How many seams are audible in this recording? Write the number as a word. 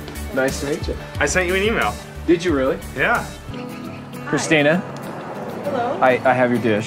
one